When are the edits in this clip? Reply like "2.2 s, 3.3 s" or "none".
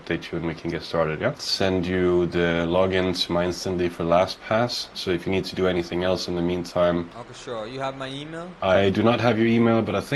1.4 s, 7.1 s